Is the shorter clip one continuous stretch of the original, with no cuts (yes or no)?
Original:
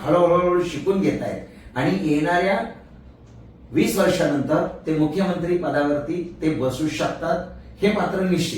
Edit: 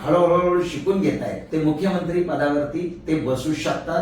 no